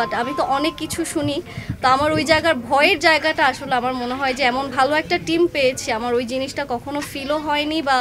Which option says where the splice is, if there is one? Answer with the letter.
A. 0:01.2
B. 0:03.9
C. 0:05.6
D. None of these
D